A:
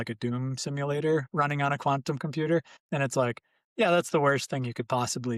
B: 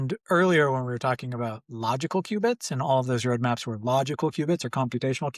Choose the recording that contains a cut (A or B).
A